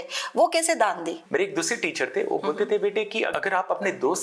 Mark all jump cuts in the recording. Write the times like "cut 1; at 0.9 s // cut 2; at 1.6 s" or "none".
cut 1; at 1.2 s // cut 2; at 3.3 s

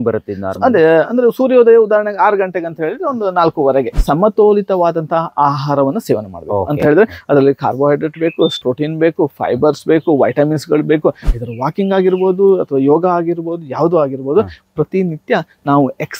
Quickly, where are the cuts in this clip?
cut 1; at 3.9 s // cut 2; at 11.2 s

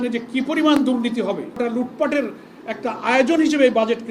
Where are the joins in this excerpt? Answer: cut 1; at 1.6 s

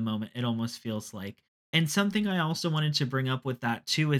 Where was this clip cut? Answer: none

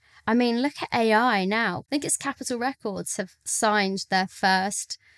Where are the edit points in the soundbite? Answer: cut 1; at 1.8 s

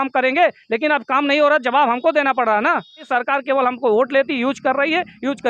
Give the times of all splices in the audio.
cut 1; at 3.1 s

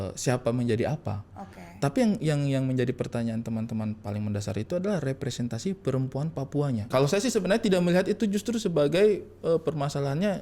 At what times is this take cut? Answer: cut 1; at 6.8 s

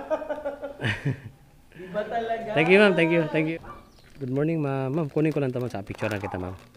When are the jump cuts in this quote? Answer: cut 1; at 3.5 s

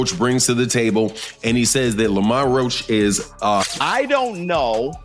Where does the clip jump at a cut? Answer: cut 1; at 3.6 s

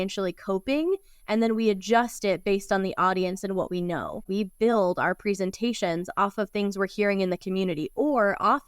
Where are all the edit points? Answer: cut 1; at 4.3 s

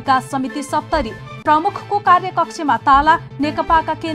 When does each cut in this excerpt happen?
none

